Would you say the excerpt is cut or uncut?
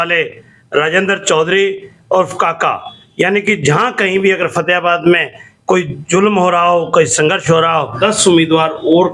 cut